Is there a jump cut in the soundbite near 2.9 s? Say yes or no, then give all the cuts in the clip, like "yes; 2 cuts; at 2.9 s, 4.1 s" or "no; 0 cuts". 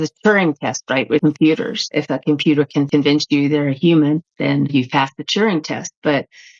yes; 3 cuts; at 1.2 s, 1.8 s, 2.9 s